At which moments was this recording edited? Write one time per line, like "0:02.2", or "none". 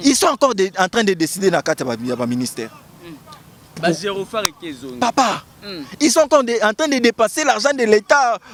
none